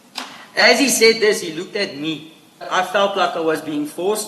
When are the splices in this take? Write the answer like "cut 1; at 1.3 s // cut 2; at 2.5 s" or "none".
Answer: cut 1; at 2.7 s